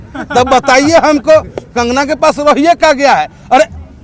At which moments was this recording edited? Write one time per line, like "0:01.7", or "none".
none